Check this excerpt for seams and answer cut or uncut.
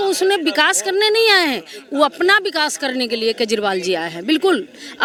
uncut